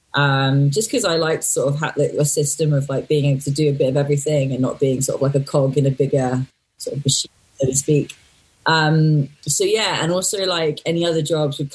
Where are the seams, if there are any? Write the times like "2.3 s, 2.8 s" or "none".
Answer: 9.4 s